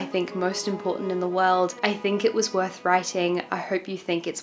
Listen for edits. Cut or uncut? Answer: uncut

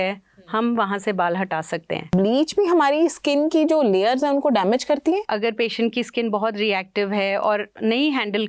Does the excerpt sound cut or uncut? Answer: cut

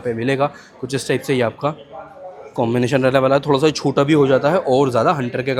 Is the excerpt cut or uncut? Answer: uncut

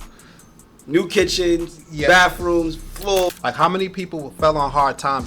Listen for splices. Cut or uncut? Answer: cut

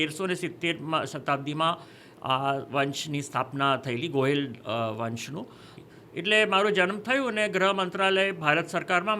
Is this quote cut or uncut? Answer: cut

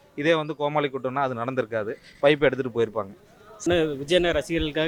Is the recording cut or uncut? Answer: uncut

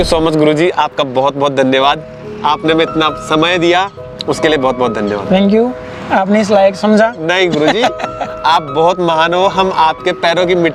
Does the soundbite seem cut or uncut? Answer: uncut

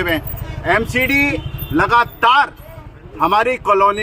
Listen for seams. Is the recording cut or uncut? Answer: uncut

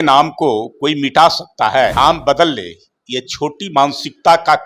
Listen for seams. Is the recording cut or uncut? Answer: cut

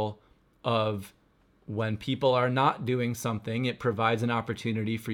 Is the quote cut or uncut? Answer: uncut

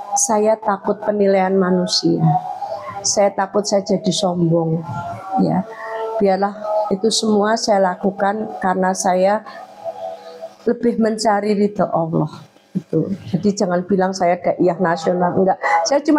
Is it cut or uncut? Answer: uncut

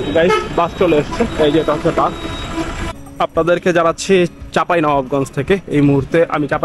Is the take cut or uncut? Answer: cut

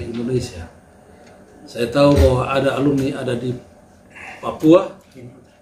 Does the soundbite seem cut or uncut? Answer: uncut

